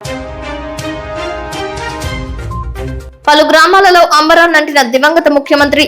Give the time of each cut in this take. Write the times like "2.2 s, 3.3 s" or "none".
1.8 s